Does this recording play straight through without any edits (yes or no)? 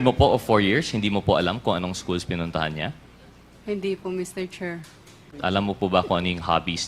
no